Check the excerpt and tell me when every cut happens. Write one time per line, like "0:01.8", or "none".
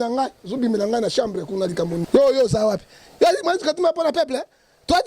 0:02.1